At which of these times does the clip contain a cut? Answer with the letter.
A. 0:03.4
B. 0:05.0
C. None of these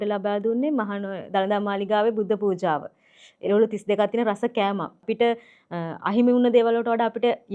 B